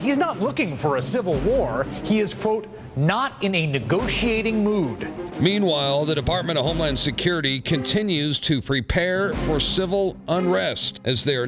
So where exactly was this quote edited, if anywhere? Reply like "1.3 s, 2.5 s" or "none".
3.5 s